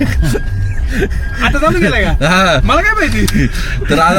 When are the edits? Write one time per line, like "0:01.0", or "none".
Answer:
none